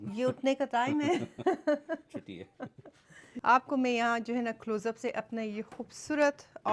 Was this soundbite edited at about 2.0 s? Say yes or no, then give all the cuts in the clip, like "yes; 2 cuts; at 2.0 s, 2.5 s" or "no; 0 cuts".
no; 1 cut; at 3.3 s